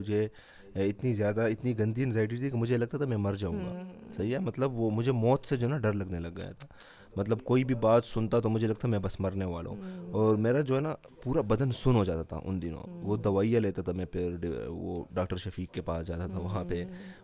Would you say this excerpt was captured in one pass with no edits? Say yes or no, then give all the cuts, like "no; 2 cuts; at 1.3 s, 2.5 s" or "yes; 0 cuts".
yes; 0 cuts